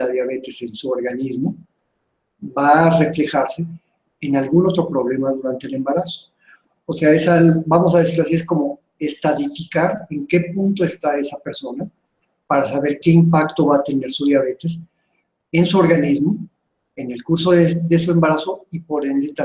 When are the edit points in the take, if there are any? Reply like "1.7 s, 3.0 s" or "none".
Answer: none